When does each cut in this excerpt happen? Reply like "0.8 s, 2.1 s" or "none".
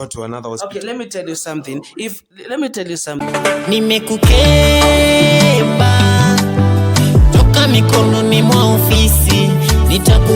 3.2 s